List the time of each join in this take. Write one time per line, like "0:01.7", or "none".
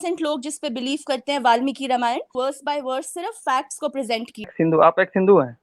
0:02.3
0:04.5